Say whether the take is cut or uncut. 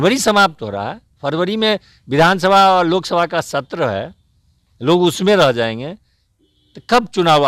uncut